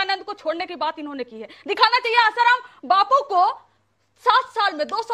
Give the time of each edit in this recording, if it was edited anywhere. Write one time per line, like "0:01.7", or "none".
none